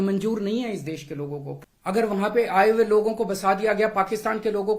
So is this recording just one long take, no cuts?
no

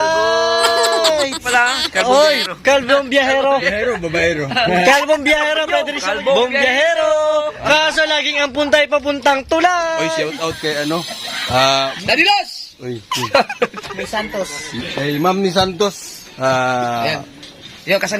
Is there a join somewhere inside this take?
yes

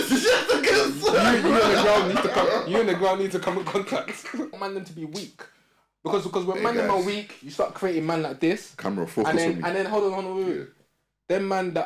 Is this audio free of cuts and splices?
no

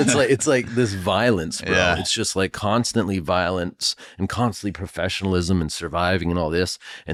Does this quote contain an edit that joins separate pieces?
no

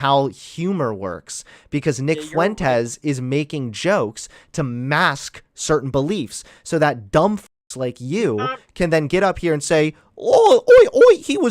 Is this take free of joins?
yes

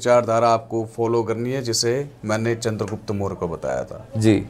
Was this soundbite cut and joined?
no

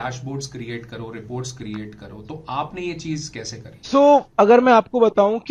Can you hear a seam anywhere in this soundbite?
no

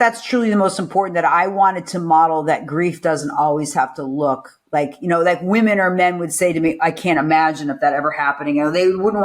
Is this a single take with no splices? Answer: yes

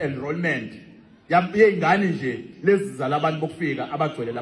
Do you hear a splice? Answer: no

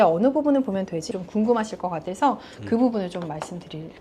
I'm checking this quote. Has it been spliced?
yes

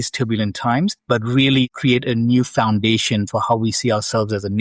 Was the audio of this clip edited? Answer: yes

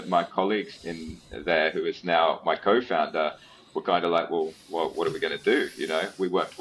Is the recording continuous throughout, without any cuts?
yes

